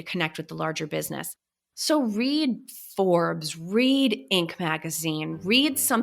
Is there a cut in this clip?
yes; 1 cut; at 1.5 s

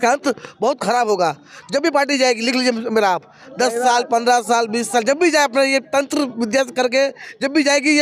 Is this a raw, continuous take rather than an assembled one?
yes; 0 cuts

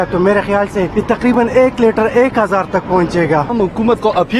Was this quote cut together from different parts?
yes; 2 cuts; at 1.3 s, 3.5 s

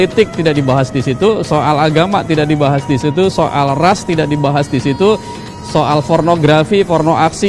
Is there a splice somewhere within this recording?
no; 0 cuts

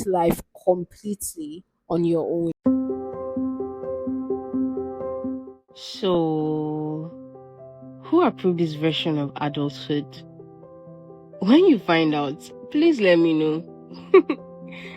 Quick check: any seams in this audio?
yes; 1 cut; at 2.5 s

